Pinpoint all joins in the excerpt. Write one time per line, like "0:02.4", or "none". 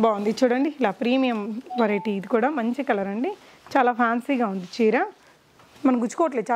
none